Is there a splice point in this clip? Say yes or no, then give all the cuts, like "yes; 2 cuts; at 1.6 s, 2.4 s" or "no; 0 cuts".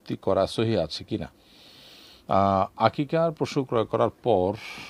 no; 0 cuts